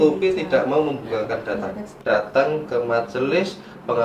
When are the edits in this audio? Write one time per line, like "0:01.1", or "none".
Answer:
0:02.0